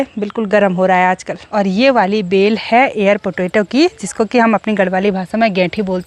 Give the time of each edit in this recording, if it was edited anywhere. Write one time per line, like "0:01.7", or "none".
0:01.4